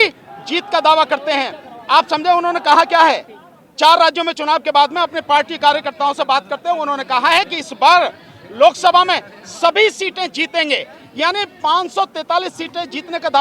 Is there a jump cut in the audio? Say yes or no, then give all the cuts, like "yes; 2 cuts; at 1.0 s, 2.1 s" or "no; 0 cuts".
no; 0 cuts